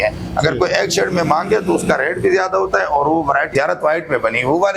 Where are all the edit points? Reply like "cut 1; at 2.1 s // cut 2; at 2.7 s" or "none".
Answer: cut 1; at 3.5 s